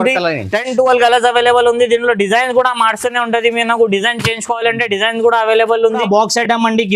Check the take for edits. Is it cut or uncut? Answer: cut